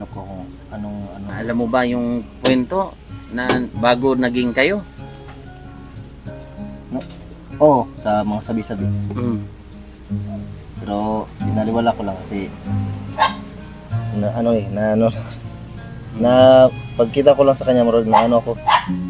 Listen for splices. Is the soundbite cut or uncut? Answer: cut